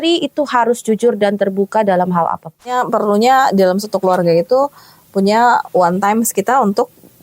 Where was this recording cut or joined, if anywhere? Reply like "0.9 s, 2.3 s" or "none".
2.7 s

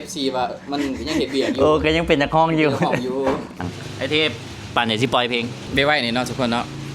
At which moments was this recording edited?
3.6 s, 5.6 s

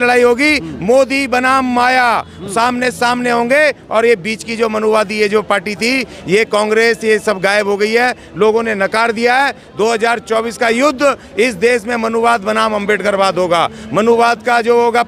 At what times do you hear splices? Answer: none

